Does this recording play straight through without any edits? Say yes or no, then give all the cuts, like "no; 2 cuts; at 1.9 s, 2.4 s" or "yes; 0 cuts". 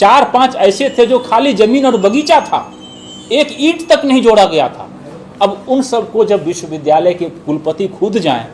yes; 0 cuts